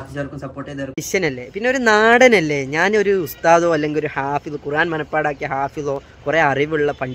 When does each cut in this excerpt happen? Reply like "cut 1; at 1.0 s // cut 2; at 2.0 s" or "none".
cut 1; at 1.0 s